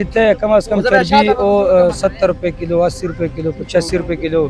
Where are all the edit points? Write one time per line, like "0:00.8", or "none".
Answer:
none